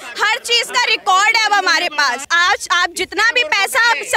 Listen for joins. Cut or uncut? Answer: cut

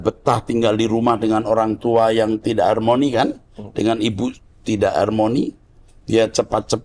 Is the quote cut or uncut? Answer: uncut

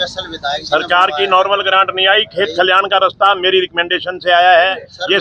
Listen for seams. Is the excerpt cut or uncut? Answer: uncut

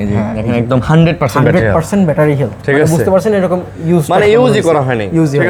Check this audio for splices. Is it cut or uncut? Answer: uncut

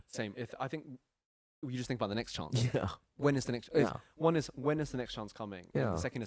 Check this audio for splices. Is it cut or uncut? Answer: uncut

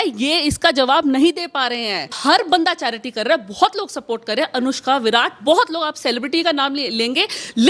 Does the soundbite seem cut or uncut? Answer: cut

